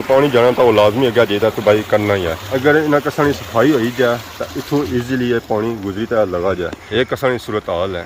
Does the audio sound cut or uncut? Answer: uncut